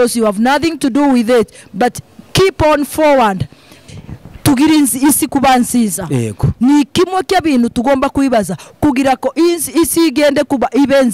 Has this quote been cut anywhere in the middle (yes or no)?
yes